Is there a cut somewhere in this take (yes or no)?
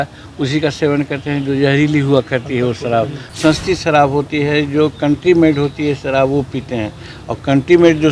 yes